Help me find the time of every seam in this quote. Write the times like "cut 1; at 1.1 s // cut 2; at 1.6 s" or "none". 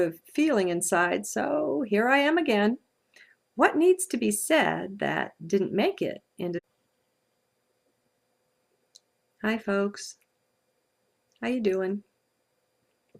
none